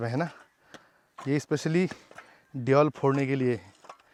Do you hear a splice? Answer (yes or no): no